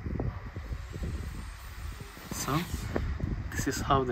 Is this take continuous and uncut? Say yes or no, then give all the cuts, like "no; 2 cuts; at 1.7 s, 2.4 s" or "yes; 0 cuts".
yes; 0 cuts